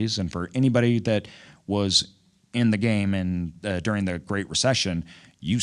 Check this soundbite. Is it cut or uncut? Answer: uncut